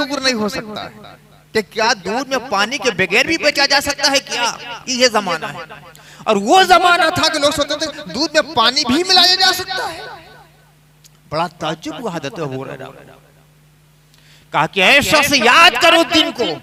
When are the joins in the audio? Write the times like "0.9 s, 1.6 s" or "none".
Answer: none

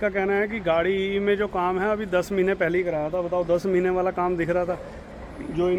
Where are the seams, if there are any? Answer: none

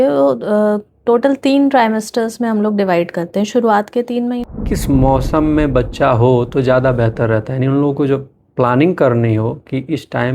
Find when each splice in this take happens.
4.4 s

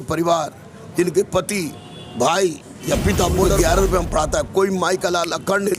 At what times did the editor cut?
3.5 s

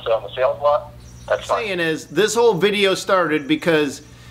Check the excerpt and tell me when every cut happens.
1.7 s

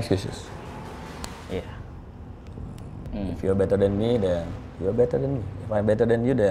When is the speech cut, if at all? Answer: 1.4 s, 3.0 s

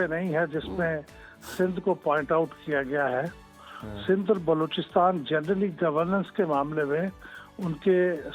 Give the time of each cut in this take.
none

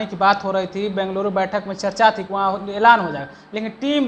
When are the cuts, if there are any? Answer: none

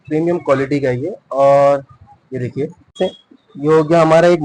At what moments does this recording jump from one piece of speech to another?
2.9 s

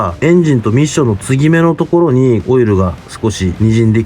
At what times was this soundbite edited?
2.4 s

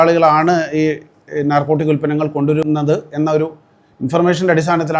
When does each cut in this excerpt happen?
2.6 s

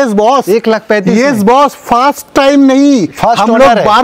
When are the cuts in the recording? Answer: none

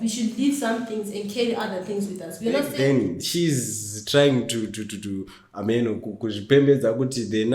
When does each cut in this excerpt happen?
2.7 s

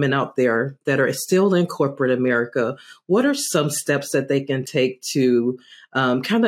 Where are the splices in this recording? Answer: none

